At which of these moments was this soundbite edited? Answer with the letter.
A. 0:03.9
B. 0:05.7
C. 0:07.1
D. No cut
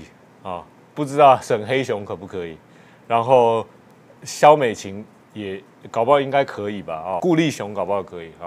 C